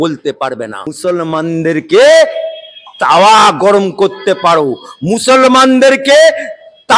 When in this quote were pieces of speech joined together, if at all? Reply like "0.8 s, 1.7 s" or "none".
0.9 s